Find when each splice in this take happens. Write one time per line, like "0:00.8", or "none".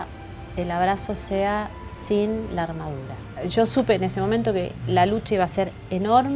0:03.5